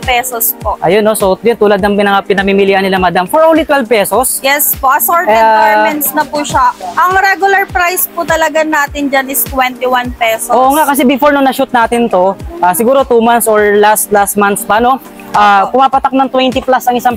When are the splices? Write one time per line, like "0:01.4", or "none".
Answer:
none